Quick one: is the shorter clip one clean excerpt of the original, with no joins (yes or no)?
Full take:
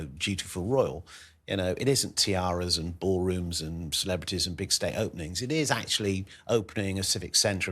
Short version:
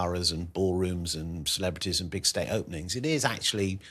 yes